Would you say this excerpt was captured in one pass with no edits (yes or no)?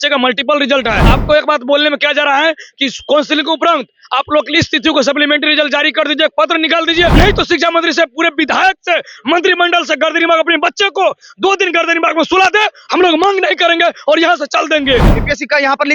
no